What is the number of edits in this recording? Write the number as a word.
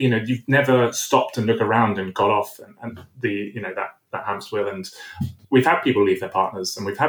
one